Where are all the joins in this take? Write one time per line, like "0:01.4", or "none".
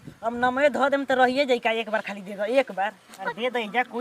0:03.1